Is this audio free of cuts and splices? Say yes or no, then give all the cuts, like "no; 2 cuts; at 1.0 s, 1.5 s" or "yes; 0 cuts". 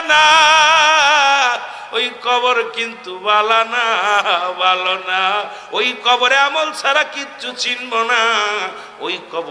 yes; 0 cuts